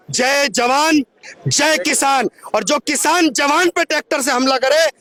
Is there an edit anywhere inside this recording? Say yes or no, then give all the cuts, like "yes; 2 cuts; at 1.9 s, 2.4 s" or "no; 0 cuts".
no; 0 cuts